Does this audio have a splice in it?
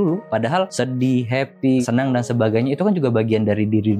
yes; 1 cut; at 1.8 s

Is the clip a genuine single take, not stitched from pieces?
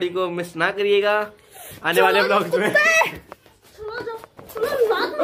yes; 0 cuts

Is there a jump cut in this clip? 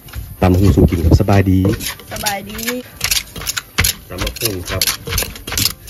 yes; 1 cut; at 2.8 s

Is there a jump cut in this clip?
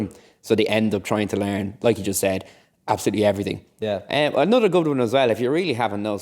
yes; 1 cut; at 3.7 s

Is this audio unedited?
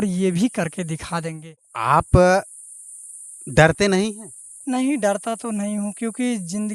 no; 1 cut; at 1.7 s

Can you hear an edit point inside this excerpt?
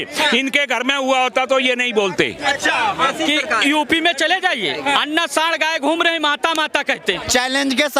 yes; 2 cuts; at 3.1 s, 7.1 s

